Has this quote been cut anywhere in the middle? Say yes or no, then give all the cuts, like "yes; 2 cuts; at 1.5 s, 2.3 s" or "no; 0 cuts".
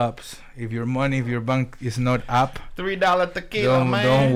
no; 0 cuts